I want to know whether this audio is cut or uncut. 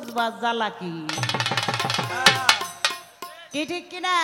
uncut